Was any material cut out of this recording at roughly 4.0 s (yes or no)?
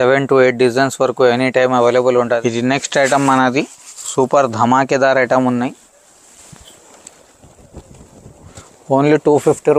no